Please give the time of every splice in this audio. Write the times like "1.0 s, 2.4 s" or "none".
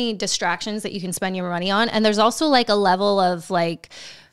none